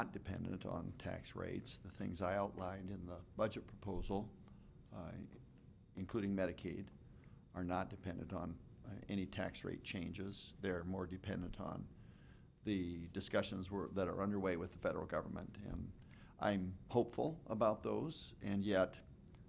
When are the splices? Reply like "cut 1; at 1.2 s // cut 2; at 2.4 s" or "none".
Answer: cut 1; at 6.0 s